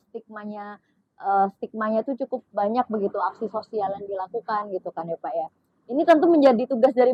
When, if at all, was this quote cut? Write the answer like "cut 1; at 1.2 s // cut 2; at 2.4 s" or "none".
none